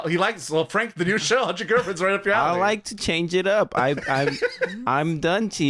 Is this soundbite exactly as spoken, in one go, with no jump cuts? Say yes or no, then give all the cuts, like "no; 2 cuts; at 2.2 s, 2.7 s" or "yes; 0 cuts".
yes; 0 cuts